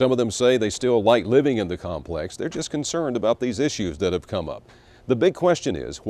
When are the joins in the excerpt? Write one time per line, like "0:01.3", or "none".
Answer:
none